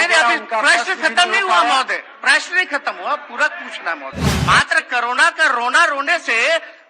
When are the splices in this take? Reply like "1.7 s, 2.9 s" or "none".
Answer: 4.4 s